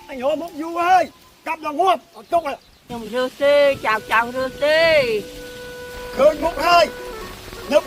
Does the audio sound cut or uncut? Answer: uncut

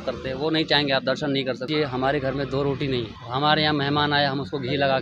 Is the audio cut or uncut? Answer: cut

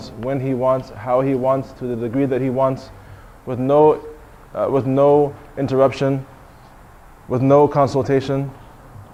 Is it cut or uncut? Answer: uncut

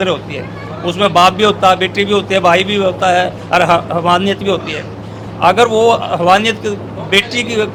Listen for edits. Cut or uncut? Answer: uncut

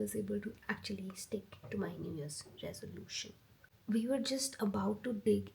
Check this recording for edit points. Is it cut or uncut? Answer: cut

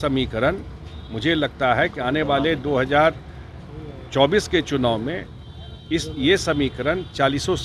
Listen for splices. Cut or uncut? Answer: uncut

